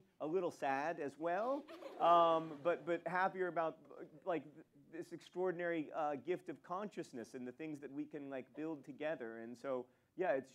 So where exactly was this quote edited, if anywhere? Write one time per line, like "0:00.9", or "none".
none